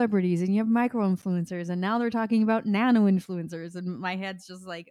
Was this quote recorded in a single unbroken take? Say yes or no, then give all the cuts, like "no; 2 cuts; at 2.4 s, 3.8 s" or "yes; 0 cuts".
yes; 0 cuts